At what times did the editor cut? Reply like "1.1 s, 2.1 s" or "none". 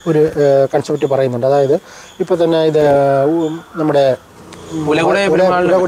none